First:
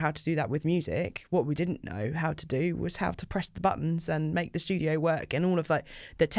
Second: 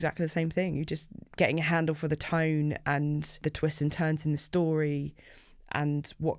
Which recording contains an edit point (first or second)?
second